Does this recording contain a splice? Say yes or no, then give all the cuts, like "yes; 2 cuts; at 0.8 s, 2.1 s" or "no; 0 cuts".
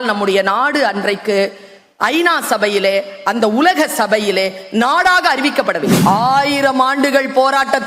yes; 1 cut; at 6.0 s